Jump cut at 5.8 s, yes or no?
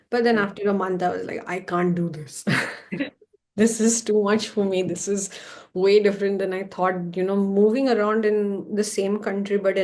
no